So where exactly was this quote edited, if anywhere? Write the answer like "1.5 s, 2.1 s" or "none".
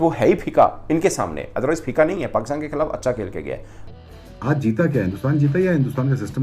3.8 s